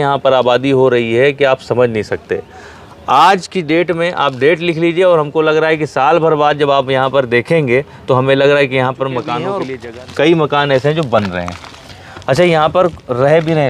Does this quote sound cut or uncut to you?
cut